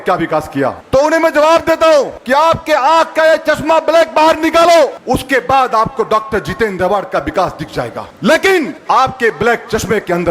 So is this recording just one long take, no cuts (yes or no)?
no